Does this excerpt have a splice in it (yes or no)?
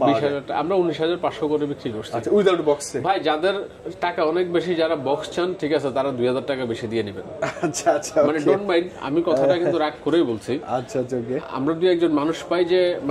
no